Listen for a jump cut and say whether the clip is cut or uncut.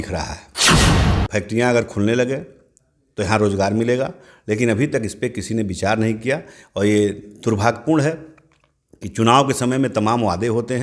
cut